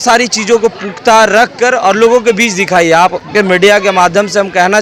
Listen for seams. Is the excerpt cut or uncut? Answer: uncut